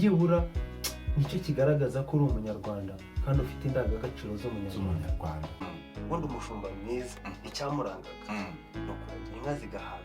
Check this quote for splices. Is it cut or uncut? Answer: cut